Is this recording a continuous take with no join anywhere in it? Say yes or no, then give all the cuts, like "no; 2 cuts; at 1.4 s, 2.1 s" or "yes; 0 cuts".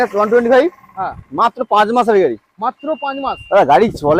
yes; 0 cuts